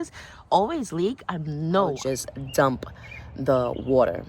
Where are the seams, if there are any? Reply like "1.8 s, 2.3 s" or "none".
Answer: 2.0 s